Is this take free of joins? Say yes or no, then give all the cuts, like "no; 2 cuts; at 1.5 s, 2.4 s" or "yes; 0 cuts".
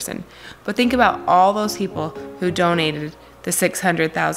yes; 0 cuts